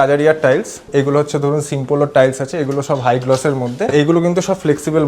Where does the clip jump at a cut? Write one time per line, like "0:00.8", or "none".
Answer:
0:00.8
0:03.9